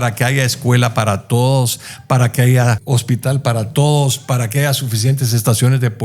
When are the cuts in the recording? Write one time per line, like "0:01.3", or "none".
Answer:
0:02.8